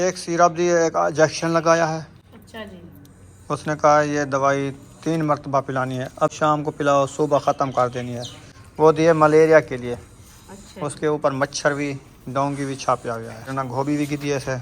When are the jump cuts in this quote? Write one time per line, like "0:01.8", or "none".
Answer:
0:06.3
0:13.5